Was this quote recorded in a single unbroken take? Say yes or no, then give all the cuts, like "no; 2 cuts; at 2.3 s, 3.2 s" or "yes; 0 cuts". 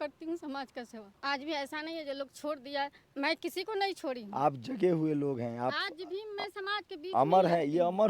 no; 2 cuts; at 1.0 s, 3.0 s